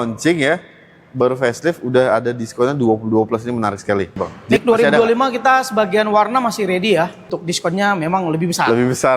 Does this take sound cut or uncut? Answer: cut